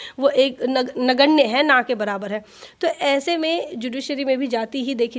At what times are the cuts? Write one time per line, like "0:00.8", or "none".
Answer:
none